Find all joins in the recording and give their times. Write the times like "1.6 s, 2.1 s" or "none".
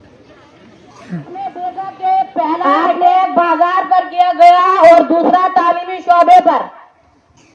1.6 s